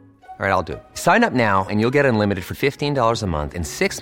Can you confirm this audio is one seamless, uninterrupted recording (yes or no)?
yes